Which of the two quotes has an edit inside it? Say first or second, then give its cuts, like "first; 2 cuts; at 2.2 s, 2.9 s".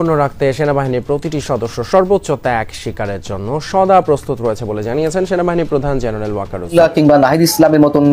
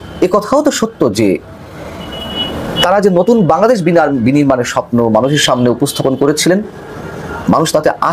first; 1 cut; at 6.7 s